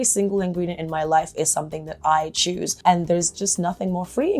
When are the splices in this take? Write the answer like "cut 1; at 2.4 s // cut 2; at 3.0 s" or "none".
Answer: cut 1; at 2.7 s // cut 2; at 3.3 s